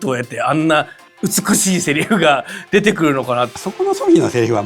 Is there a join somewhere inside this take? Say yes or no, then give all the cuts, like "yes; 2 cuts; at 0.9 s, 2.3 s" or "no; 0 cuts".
yes; 1 cut; at 3.6 s